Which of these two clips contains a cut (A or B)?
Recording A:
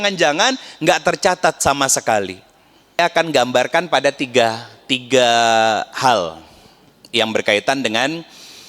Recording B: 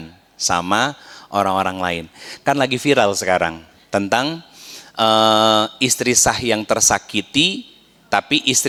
A